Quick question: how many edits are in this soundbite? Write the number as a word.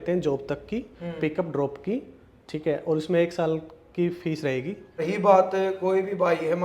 one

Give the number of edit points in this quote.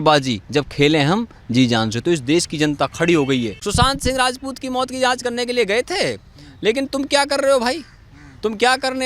one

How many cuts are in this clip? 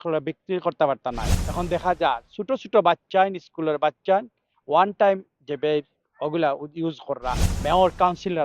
two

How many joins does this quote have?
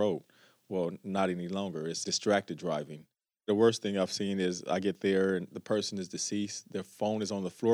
two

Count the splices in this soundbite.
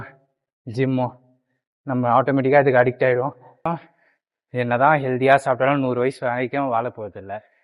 one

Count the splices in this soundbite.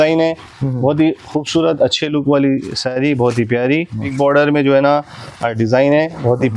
one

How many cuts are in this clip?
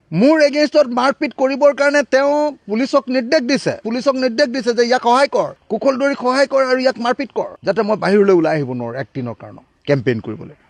one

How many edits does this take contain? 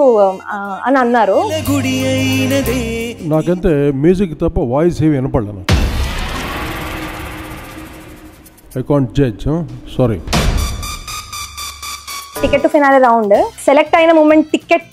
one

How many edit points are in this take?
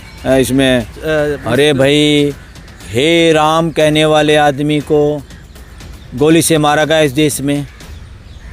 one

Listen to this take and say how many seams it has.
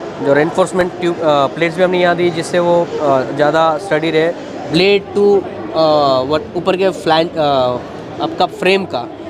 one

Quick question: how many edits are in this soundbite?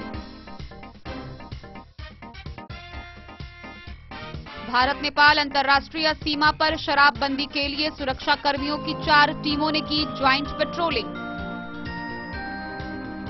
zero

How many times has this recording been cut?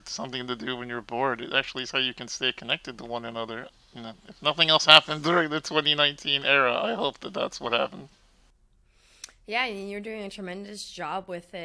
zero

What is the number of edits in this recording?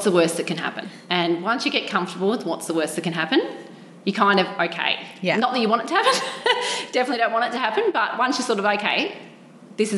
one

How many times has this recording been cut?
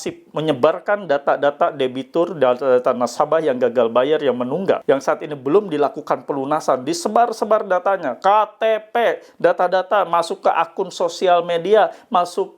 one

